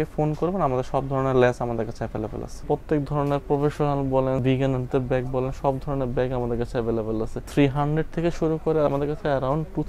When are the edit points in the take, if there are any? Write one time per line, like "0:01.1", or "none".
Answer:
0:02.6
0:04.4
0:07.4
0:08.9